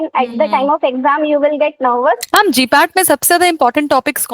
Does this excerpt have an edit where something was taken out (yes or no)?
yes